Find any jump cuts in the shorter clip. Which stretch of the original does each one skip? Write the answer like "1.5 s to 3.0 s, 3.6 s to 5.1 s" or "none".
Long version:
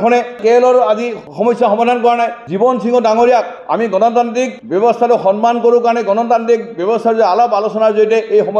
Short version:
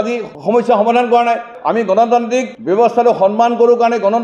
2.4 s to 3.6 s